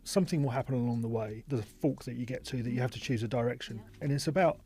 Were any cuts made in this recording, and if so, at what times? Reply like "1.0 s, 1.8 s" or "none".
1.4 s

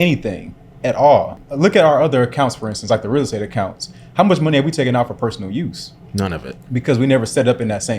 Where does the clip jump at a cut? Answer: 1.4 s

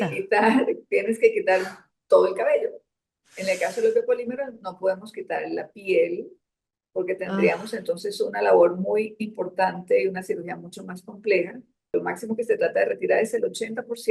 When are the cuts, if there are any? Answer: 11.9 s

